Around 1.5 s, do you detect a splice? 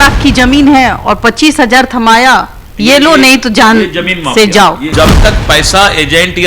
no; 1 cut; at 4.8 s

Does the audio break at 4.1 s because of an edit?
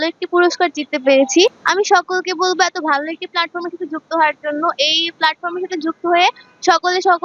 no; 1 cut; at 1.6 s

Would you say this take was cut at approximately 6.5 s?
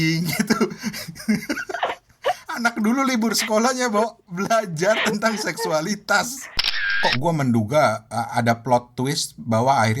yes; 1 cut; at 6.5 s

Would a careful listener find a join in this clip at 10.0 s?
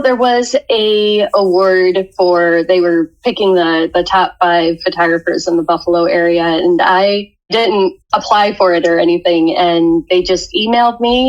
yes; 2 cuts; at 7.8 s, 10.0 s

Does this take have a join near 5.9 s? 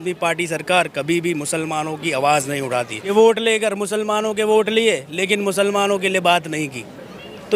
no; 1 cut; at 3.1 s

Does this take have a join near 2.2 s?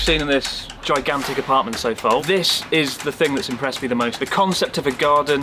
yes; 2 cuts; at 2.2 s, 4.2 s

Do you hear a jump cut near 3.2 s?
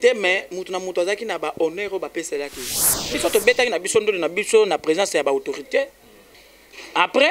yes; 1 cut; at 3.2 s

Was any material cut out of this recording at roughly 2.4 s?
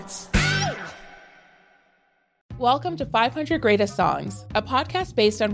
yes; 1 cut; at 2.4 s

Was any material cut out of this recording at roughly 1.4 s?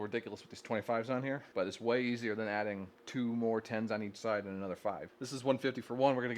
yes; 3 cuts; at 1.4 s, 2.9 s, 5.1 s

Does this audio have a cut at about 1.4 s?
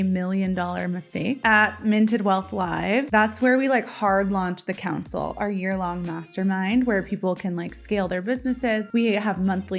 yes; 1 cut; at 1.4 s

